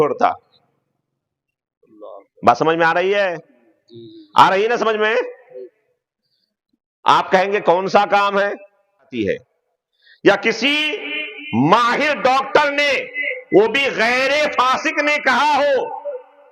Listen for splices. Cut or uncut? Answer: cut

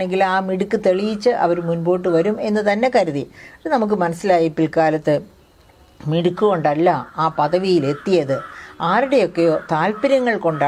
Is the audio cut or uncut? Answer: uncut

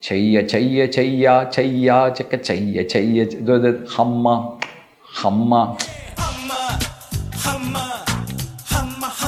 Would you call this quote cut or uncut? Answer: uncut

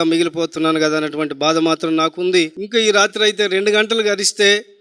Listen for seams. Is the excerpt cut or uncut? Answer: cut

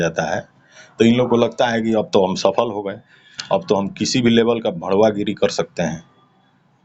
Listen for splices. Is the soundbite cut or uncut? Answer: uncut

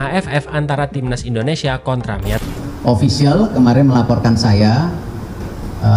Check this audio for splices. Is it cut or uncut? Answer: cut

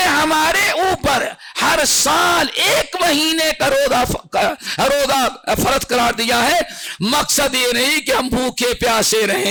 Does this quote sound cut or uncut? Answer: uncut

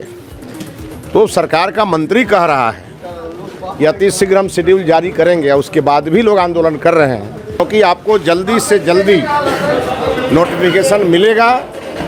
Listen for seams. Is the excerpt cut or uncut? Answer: uncut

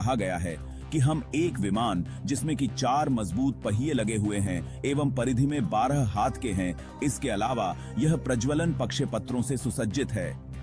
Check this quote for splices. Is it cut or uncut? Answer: uncut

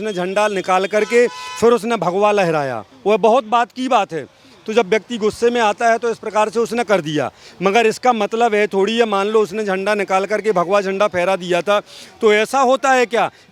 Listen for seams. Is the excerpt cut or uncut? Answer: uncut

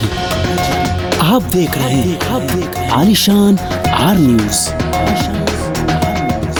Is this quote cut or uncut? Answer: uncut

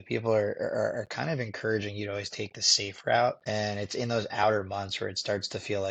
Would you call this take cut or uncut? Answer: uncut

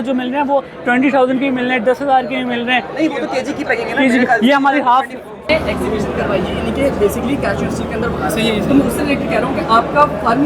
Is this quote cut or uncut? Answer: cut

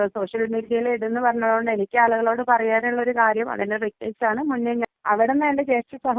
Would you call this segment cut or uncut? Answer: cut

